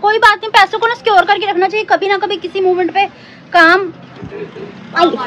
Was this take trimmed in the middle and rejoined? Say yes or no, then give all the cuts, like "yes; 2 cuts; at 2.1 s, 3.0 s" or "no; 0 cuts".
no; 0 cuts